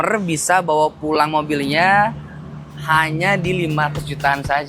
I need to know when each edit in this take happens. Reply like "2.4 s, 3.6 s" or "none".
none